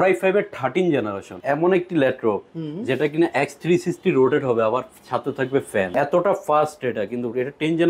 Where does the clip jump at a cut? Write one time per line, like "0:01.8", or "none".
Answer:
0:01.3
0:05.9